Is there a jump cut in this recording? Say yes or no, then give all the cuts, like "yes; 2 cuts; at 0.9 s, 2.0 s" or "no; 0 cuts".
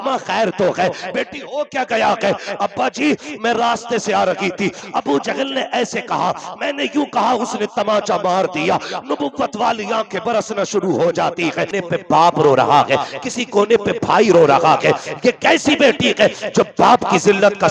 yes; 1 cut; at 11.8 s